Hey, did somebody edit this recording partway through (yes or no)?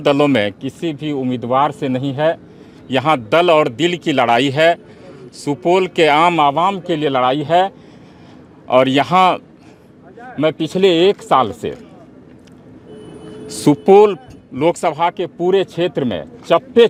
no